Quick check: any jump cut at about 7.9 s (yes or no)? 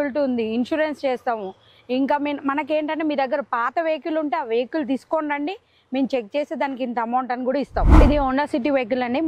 yes